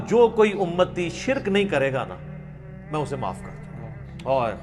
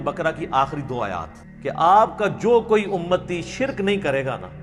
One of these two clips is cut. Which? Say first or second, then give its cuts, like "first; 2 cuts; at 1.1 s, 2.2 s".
second; 1 cut; at 1.4 s